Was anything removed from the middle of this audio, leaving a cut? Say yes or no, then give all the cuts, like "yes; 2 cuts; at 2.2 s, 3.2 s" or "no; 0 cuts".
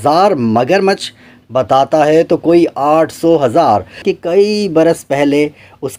yes; 1 cut; at 4.1 s